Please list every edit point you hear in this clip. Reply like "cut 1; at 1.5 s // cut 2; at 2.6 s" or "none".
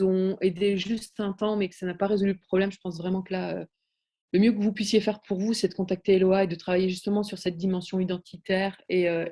none